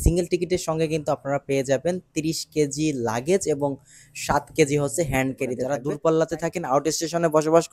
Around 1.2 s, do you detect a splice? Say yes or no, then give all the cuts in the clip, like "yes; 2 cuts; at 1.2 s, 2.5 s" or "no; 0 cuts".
no; 1 cut; at 5.7 s